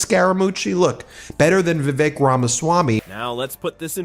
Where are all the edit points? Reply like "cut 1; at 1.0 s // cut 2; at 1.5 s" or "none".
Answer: none